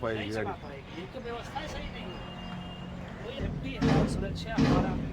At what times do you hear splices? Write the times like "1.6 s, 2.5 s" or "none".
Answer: 3.4 s